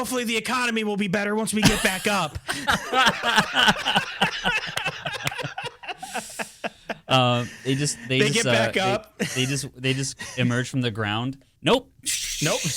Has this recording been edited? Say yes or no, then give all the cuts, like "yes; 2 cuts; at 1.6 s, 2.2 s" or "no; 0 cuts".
yes; 1 cut; at 11.5 s